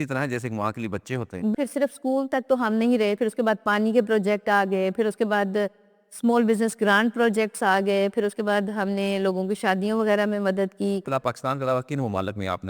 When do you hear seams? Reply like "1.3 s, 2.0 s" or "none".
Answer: 1.5 s, 11.0 s